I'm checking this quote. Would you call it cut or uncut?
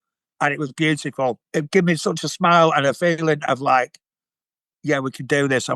cut